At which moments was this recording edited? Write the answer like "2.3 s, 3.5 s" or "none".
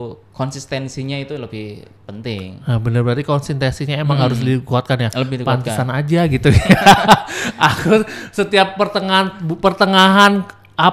none